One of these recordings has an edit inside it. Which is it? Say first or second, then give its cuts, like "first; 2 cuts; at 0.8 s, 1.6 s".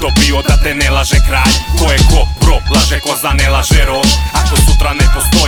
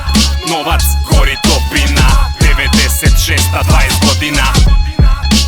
second; 1 cut; at 4.5 s